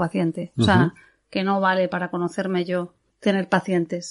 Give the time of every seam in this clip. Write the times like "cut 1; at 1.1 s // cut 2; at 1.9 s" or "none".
cut 1; at 3.0 s